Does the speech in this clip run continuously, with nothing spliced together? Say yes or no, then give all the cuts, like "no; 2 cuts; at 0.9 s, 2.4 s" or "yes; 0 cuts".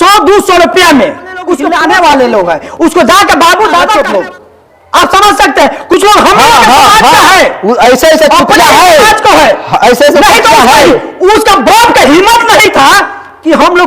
no; 2 cuts; at 1.7 s, 3.9 s